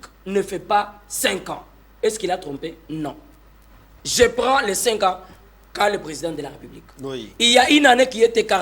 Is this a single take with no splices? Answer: yes; 0 cuts

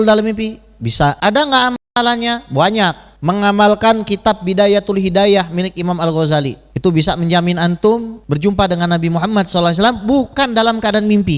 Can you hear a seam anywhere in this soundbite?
yes; 4 cuts; at 1.2 s, 3.1 s, 6.6 s, 8.2 s

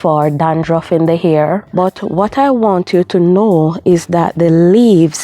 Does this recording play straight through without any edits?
no; 1 cut; at 2.0 s

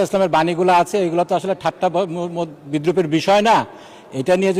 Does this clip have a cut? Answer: no; 0 cuts

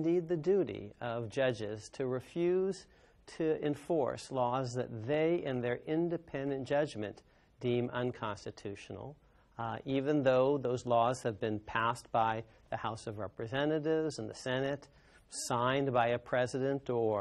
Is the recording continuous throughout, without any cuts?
yes; 0 cuts

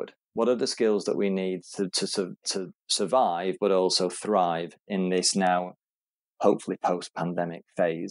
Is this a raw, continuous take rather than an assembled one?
yes; 0 cuts

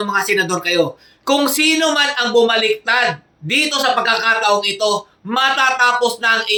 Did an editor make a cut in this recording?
no; 0 cuts

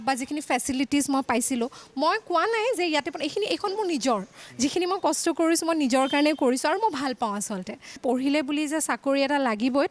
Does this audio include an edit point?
yes; 1 cut; at 8.0 s

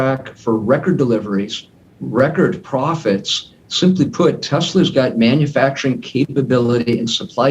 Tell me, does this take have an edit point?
no; 0 cuts

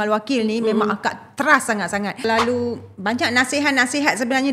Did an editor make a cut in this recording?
yes; 1 cut; at 2.2 s

